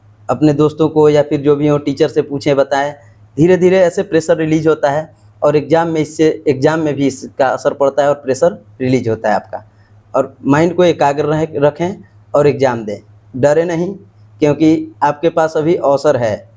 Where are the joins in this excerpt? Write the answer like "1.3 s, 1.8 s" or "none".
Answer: none